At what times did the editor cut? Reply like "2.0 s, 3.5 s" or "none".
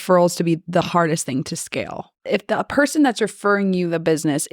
2.2 s